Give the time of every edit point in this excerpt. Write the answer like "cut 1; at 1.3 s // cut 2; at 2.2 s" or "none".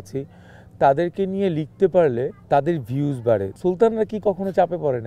cut 1; at 2.4 s // cut 2; at 3.5 s